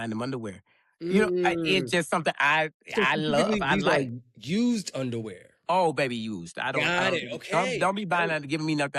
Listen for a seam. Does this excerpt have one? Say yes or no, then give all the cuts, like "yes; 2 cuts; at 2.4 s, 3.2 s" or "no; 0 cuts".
no; 0 cuts